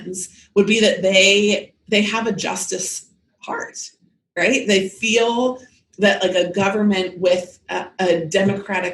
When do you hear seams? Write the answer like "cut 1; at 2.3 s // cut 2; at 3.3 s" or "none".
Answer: none